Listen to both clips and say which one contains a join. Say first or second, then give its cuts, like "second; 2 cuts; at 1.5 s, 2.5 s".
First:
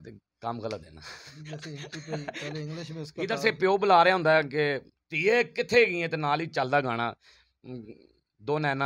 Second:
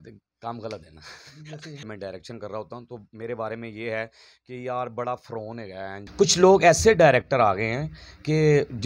second; 2 cuts; at 1.9 s, 6.0 s